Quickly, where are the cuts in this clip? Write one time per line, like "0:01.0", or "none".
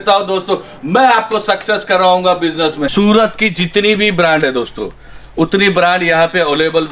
0:02.9